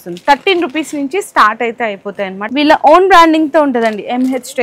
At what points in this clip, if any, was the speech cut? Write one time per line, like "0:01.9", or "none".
0:02.5

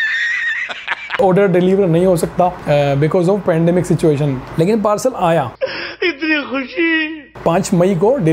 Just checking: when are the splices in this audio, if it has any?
none

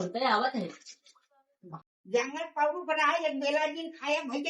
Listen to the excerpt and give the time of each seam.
0:01.7

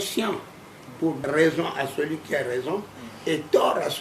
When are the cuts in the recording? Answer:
0:01.2

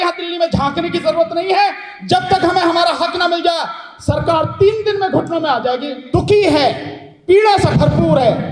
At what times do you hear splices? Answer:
0:05.9

